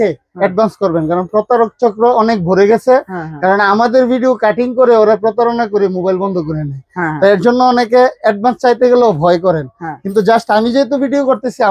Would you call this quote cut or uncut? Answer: uncut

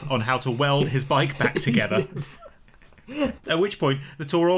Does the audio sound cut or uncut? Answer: cut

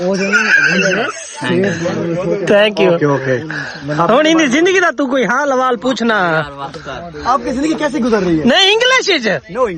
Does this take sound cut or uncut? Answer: uncut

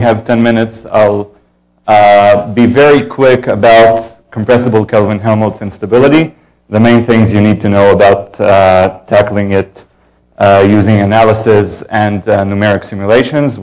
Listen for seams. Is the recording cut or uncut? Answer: cut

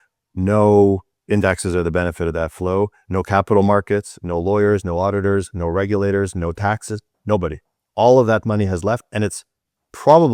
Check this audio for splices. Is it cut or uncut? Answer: uncut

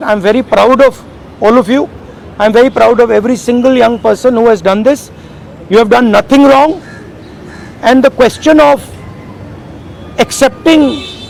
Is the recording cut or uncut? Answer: uncut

